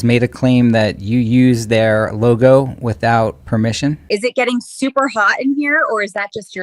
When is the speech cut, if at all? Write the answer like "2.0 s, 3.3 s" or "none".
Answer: 4.0 s